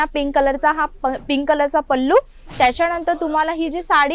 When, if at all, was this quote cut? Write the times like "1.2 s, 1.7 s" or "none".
none